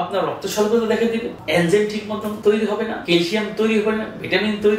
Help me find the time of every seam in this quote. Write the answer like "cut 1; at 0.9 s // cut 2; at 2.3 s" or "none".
cut 1; at 1.3 s // cut 2; at 2.3 s // cut 3; at 3.0 s